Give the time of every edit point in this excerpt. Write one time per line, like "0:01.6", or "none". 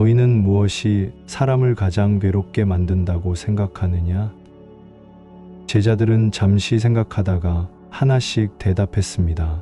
none

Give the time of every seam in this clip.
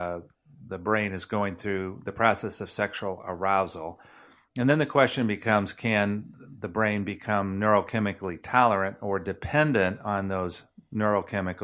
none

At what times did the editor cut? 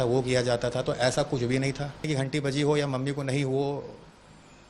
0:02.0

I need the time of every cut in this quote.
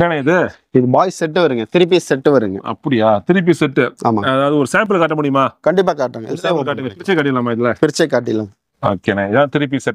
none

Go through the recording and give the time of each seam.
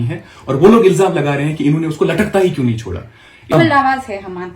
0:03.5

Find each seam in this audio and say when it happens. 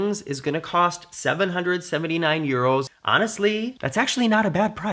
none

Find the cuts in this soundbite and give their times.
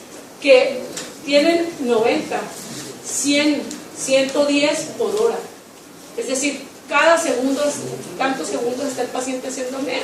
0:02.4

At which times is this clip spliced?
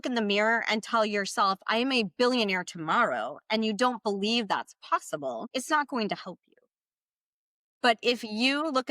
0:05.4

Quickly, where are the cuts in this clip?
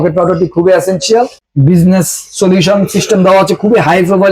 0:01.4

